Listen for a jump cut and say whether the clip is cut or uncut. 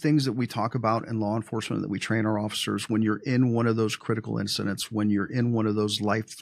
uncut